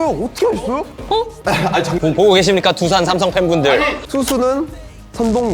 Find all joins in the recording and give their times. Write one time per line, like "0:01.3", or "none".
0:04.0